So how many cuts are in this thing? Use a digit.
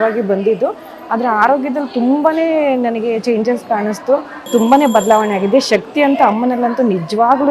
1